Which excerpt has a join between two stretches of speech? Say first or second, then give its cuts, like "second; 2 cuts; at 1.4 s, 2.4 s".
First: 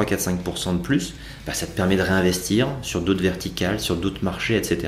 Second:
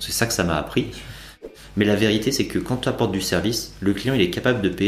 second; 1 cut; at 1.3 s